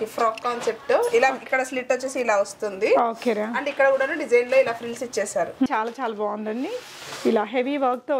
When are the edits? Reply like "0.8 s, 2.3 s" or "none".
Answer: 5.7 s